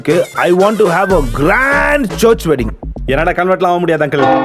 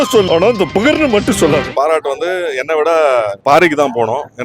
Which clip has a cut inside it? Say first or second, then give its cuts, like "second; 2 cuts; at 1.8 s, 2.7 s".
second; 2 cuts; at 1.7 s, 3.3 s